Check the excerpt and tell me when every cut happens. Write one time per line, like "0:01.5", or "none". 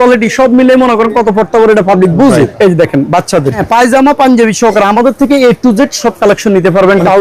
0:02.5
0:03.6